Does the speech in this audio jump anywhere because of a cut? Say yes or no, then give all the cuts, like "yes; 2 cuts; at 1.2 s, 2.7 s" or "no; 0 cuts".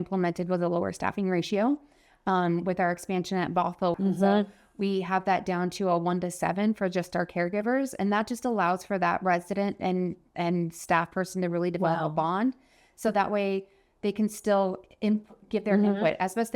yes; 1 cut; at 4.0 s